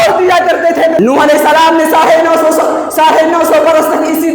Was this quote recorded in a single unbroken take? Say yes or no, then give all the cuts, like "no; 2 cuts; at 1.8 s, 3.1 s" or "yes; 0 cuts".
no; 1 cut; at 1.0 s